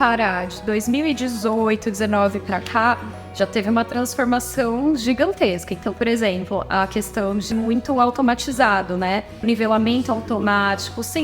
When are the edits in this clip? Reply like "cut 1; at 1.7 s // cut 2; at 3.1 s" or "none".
cut 1; at 7.5 s // cut 2; at 9.4 s